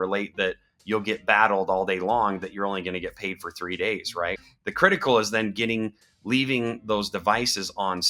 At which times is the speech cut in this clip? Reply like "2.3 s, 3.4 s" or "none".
4.4 s